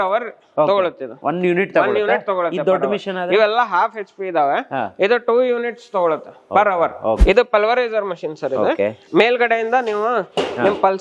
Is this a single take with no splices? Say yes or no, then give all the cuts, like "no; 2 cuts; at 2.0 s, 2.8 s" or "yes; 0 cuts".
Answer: no; 2 cuts; at 1.2 s, 7.2 s